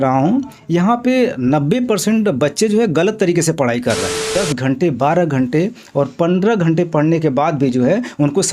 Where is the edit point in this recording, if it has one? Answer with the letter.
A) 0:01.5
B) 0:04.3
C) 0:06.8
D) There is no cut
B